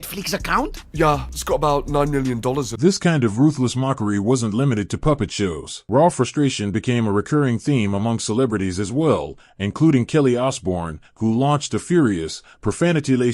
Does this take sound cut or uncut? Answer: uncut